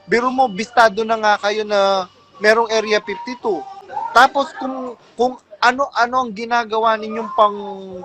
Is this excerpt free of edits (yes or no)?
no